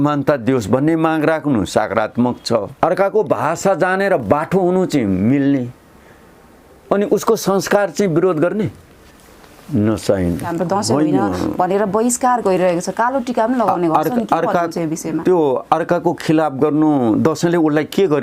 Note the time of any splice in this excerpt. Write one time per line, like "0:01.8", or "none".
0:02.7
0:10.5